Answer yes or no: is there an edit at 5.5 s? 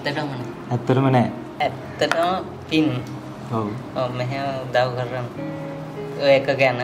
no